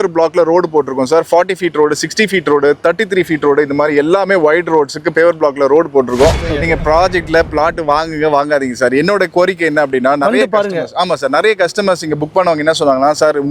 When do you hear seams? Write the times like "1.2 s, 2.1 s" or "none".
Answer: 6.5 s